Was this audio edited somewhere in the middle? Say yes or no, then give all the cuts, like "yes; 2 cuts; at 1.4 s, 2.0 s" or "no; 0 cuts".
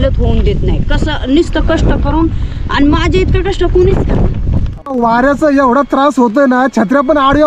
yes; 1 cut; at 4.7 s